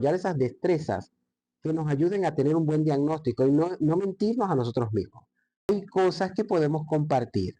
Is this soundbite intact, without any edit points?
no; 1 cut; at 5.7 s

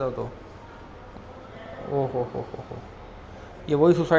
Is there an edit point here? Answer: no; 0 cuts

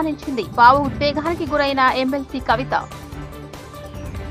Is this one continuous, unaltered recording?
yes; 0 cuts

